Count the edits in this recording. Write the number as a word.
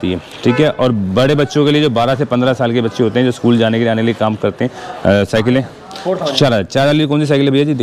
zero